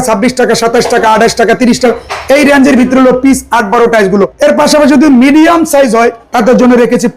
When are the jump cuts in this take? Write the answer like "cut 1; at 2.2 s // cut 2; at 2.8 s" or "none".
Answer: cut 1; at 4.3 s // cut 2; at 6.2 s